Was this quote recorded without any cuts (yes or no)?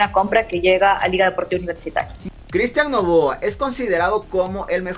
no